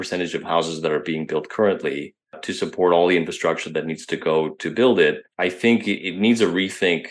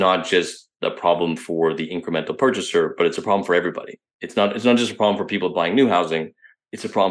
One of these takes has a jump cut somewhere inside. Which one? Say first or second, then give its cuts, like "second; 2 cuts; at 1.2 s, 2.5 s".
first; 2 cuts; at 2.4 s, 5.7 s